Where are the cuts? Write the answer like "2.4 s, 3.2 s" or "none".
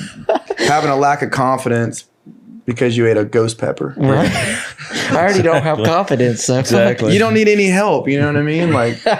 none

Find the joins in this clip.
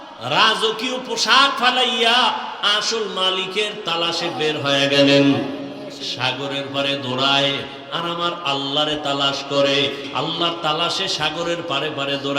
10.0 s

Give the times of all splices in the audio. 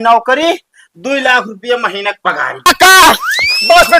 2.7 s

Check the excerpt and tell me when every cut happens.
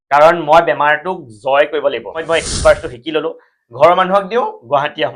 2.2 s

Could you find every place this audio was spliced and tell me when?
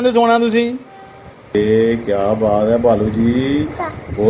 1.5 s

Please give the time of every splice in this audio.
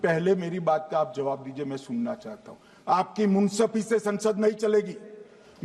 none

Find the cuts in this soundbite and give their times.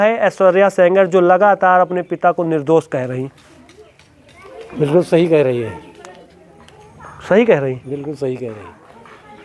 none

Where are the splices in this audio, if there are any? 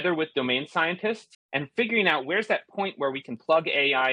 1.4 s

